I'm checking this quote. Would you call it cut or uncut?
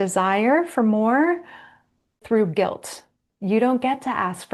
cut